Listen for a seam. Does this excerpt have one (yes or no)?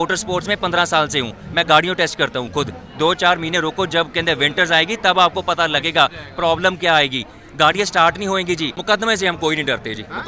yes